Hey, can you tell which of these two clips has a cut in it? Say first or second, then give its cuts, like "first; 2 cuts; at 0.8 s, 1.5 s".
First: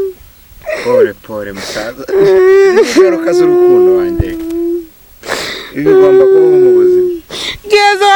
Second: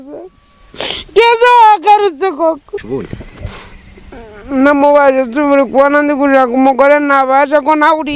second; 1 cut; at 2.8 s